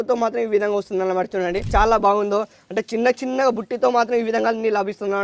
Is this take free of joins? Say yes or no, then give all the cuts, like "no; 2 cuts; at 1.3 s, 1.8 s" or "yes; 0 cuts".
no; 1 cut; at 1.7 s